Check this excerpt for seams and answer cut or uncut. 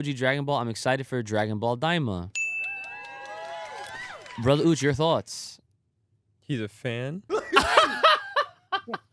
uncut